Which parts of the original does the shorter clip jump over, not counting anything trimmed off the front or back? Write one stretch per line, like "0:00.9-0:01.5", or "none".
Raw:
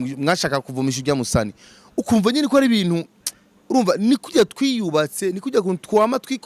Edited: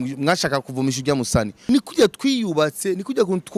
0:01.7-0:04.1